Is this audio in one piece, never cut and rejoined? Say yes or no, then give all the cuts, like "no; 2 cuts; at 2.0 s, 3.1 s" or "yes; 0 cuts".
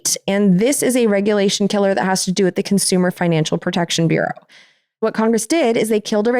no; 1 cut; at 5.0 s